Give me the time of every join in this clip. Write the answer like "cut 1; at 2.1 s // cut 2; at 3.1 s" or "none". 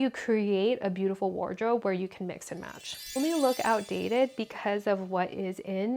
cut 1; at 3.2 s